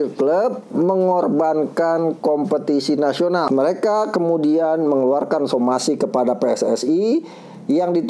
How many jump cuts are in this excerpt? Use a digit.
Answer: 1